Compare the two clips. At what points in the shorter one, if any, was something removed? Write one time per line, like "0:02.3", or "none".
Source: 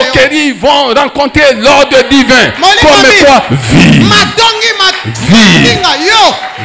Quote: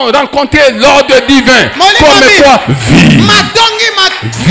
none